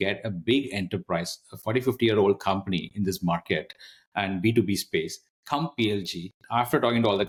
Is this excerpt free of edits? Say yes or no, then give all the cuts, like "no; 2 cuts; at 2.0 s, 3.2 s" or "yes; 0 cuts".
yes; 0 cuts